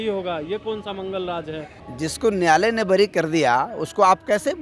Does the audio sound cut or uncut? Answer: cut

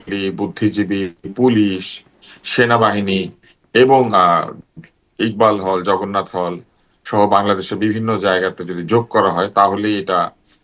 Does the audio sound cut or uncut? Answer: uncut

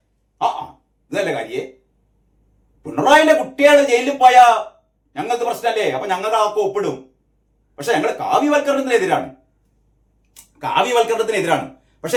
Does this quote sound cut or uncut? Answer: uncut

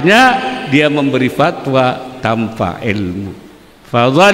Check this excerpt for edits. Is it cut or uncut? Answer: uncut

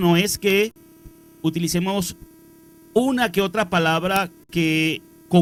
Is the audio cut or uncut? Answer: uncut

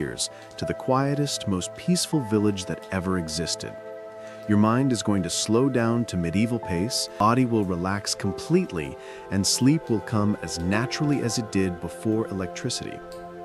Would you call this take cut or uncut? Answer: cut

